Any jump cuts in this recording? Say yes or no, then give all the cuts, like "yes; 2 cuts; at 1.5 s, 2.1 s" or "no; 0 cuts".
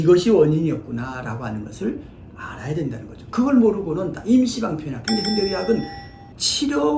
no; 0 cuts